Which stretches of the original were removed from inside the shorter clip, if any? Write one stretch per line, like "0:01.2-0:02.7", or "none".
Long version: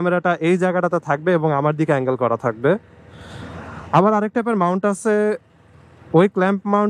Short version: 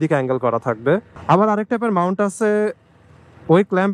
0:02.9-0:03.8